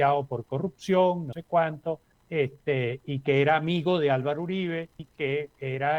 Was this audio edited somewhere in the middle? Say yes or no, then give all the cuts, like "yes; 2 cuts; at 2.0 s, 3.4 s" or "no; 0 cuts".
yes; 2 cuts; at 1.6 s, 5.0 s